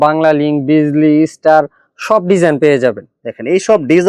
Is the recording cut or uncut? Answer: uncut